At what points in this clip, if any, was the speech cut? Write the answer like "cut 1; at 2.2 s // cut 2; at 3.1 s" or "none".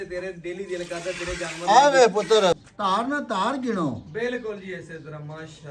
cut 1; at 2.6 s